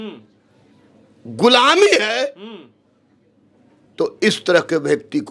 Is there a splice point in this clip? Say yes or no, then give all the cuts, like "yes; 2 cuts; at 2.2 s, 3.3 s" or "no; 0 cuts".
no; 0 cuts